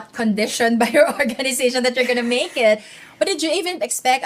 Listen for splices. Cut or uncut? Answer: uncut